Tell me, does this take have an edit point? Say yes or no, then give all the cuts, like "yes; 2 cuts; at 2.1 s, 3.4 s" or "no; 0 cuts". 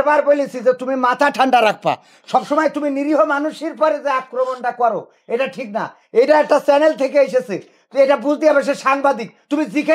no; 0 cuts